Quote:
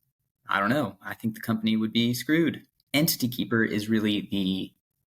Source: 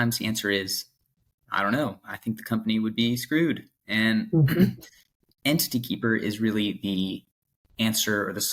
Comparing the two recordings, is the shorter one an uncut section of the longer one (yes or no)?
no